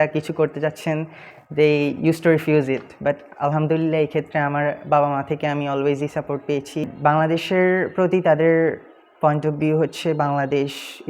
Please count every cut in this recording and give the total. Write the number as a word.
one